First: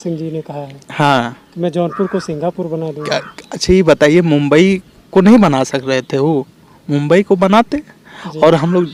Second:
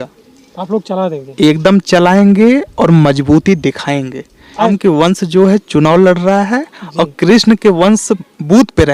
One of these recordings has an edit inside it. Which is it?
second; 1 cut; at 4.7 s

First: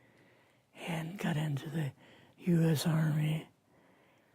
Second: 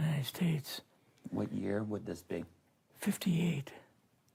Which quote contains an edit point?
first; 1 cut; at 0.9 s

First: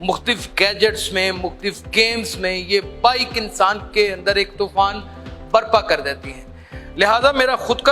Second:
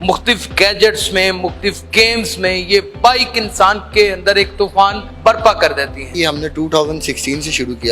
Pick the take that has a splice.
second; 2 cuts; at 5.1 s, 6.1 s

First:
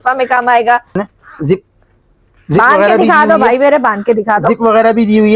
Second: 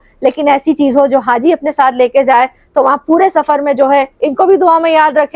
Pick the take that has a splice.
first; 1 cut; at 1.0 s

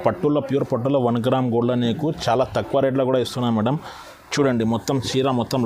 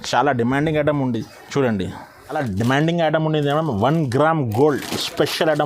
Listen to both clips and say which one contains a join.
second; 1 cut; at 2.4 s

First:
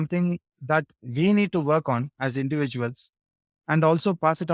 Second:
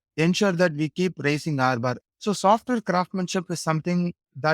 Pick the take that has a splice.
second; 1 cut; at 2.0 s

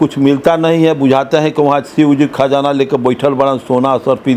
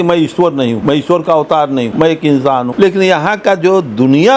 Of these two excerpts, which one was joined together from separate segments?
second; 3 cuts; at 0.8 s, 1.9 s, 2.7 s

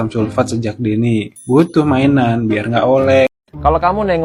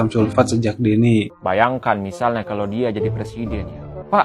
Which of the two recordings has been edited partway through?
second; 1 cut; at 1.3 s

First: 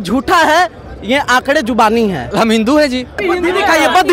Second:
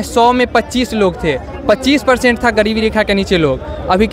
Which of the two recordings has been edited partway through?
first; 2 cuts; at 2.3 s, 3.2 s

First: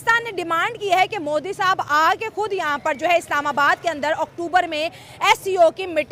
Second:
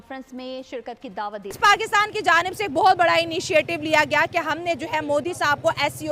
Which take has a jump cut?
second; 1 cut; at 1.6 s

